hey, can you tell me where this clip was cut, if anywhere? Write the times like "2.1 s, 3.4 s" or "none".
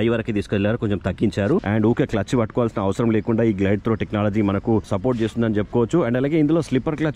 1.6 s, 4.9 s